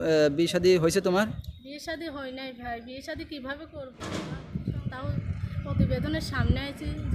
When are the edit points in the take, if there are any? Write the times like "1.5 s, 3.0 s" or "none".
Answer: 4.0 s